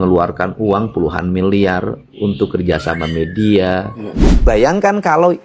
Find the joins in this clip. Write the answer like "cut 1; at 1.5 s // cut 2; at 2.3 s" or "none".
cut 1; at 4.2 s